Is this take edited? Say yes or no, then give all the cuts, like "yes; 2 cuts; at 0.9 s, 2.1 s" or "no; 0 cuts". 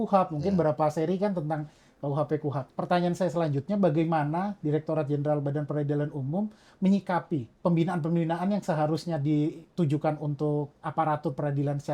yes; 3 cuts; at 2.6 s, 7.5 s, 9.6 s